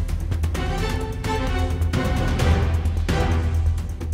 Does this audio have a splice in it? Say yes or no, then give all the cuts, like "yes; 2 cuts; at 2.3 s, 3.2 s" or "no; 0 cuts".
no; 0 cuts